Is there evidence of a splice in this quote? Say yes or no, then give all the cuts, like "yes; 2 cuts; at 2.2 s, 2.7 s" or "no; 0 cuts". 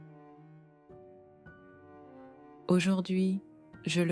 no; 0 cuts